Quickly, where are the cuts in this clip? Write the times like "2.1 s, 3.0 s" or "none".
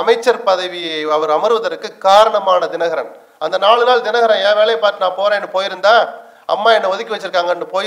none